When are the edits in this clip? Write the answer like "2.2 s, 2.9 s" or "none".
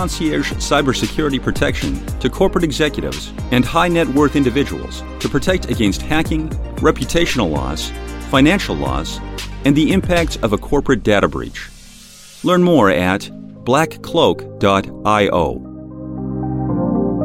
15.9 s